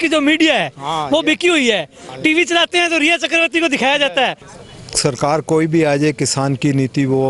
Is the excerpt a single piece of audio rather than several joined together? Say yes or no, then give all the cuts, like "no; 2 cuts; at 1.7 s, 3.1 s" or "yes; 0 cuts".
no; 1 cut; at 4.5 s